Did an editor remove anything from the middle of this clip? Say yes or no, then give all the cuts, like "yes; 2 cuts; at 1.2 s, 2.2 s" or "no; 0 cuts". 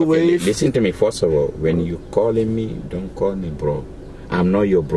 no; 0 cuts